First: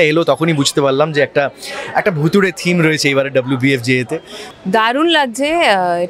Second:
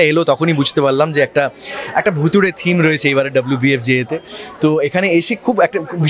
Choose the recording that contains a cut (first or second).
first